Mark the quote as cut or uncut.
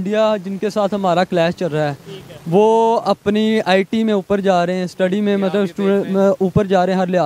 uncut